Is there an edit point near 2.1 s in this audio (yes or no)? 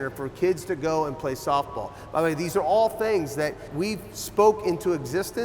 no